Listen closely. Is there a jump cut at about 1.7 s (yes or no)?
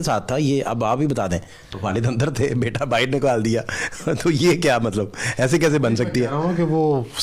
yes